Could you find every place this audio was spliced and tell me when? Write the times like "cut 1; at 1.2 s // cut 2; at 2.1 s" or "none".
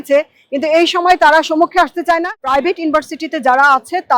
cut 1; at 2.3 s